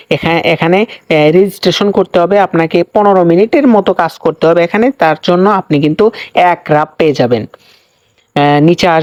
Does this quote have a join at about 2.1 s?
no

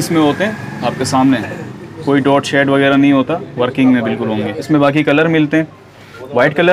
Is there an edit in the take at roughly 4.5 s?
yes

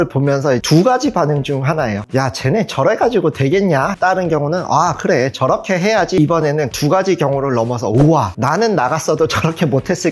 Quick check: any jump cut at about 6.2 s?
yes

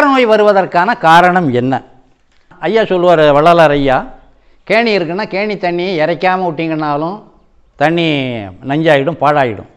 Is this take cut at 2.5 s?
yes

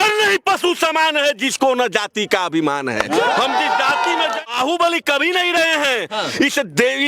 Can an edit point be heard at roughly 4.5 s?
yes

